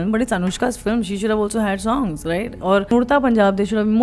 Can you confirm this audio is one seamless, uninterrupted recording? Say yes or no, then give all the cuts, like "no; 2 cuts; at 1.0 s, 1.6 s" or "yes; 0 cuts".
no; 1 cut; at 2.9 s